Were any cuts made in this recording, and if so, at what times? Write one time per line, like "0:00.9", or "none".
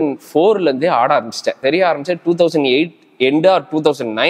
0:01.6